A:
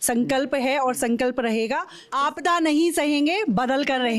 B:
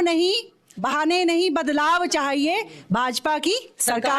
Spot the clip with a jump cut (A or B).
A